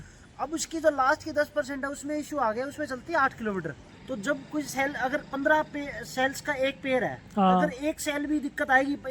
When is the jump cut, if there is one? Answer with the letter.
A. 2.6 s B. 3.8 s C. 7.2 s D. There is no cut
B